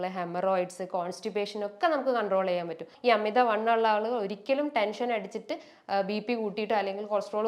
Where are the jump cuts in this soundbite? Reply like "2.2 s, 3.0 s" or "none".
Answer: 2.8 s